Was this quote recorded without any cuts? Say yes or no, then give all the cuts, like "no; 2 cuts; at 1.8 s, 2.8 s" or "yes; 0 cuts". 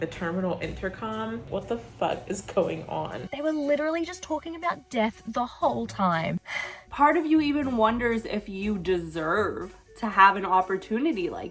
no; 3 cuts; at 1.5 s, 3.3 s, 6.6 s